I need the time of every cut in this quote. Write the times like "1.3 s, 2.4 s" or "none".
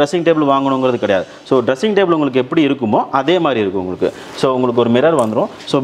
none

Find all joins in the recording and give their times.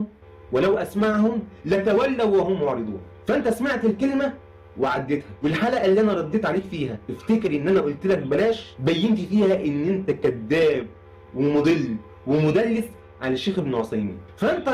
none

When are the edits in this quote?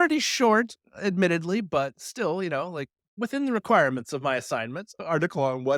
none

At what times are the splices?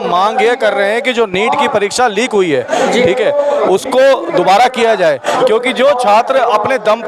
none

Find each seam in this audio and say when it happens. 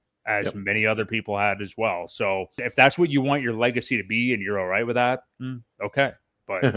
2.6 s

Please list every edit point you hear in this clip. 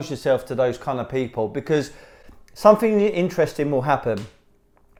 none

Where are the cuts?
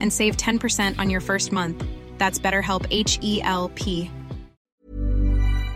4.7 s

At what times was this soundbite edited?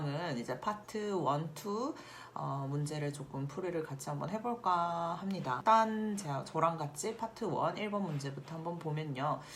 5.6 s

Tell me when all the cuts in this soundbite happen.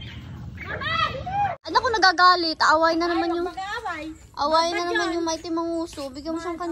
1.7 s

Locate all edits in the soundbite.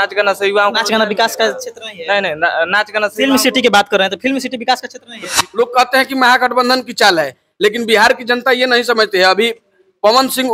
5.3 s

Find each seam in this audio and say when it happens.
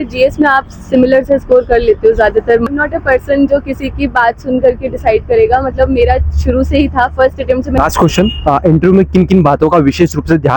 2.7 s, 7.8 s

